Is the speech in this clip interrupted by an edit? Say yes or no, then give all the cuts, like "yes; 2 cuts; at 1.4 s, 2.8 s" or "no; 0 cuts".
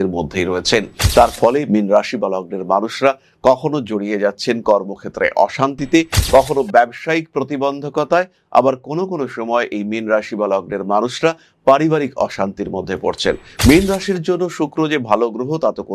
yes; 2 cuts; at 1.0 s, 13.5 s